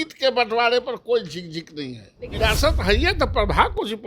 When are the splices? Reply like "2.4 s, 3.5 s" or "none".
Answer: 2.3 s